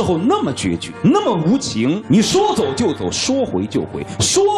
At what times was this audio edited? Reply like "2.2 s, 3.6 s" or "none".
0.9 s, 2.0 s